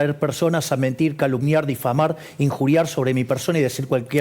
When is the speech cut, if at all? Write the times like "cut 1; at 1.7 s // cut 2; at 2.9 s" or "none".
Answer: none